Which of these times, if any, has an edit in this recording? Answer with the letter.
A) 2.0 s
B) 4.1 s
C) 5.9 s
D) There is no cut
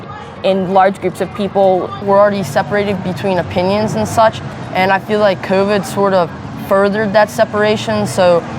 A